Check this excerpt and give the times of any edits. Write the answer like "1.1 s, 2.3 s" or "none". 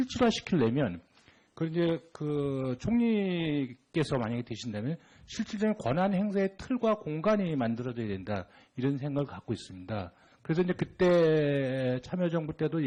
none